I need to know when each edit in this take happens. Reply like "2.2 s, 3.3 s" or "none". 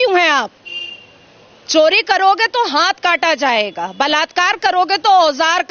none